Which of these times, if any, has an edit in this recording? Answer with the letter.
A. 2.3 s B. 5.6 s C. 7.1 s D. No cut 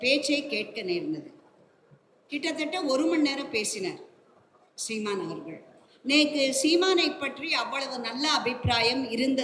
D